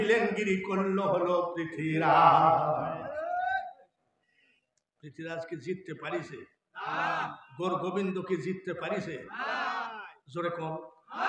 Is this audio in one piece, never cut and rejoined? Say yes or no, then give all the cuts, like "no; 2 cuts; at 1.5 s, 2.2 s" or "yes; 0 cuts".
yes; 0 cuts